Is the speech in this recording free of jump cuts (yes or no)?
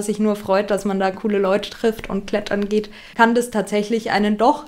no